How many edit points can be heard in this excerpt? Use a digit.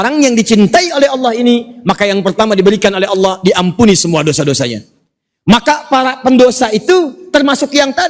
0